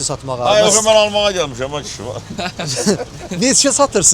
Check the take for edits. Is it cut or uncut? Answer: uncut